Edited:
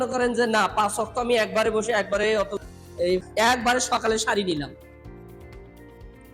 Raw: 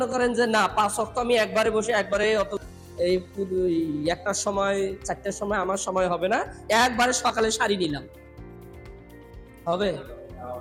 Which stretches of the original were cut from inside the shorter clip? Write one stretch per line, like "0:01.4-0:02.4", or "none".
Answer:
0:03.3-0:06.6

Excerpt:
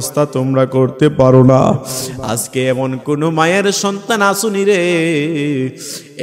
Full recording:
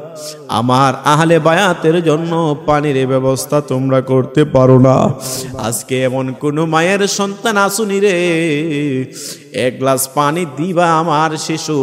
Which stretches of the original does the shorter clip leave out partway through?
none

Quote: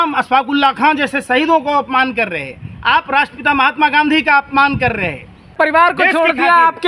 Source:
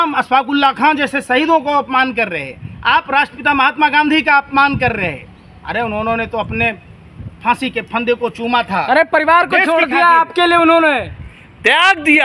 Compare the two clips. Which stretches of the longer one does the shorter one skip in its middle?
0:05.6-0:09.1

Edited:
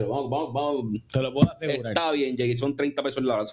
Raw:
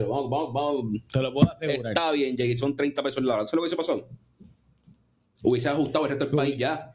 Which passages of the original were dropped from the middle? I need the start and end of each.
none

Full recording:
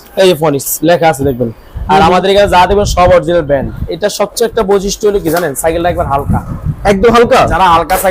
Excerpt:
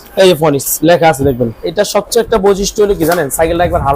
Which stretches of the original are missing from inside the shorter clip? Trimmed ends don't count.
0:01.6-0:03.8

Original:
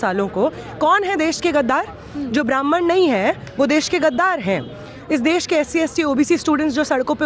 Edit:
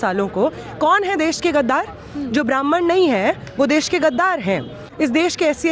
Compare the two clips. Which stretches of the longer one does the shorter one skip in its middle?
0:04.8-0:04.9

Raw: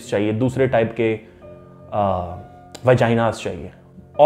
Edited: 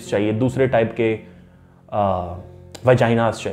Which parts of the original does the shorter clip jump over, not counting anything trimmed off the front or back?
none

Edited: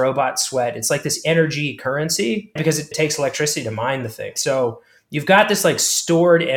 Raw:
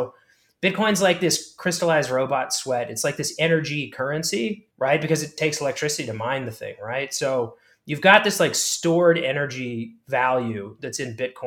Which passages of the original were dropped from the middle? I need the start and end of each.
0:04.9-0:05.1
0:06.8-0:07.1

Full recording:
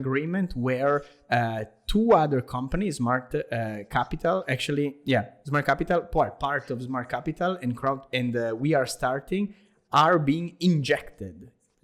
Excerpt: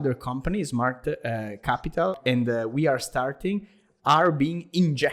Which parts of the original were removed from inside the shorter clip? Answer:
0:04.4-0:08.0

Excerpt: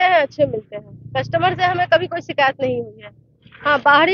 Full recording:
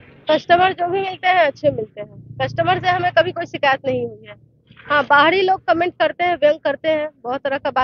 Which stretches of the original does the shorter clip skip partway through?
none

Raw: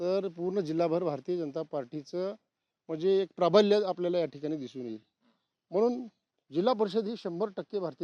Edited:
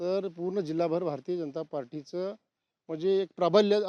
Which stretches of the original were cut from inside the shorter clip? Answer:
none

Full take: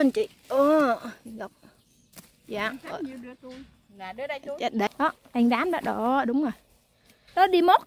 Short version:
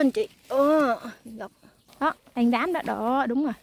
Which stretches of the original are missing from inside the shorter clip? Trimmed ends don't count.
0:02.0-0:04.9

